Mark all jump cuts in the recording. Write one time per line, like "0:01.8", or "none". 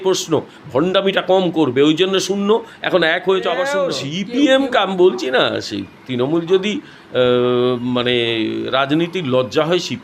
0:03.7